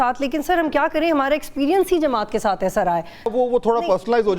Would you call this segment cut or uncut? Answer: cut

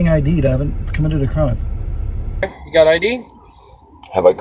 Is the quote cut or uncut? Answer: cut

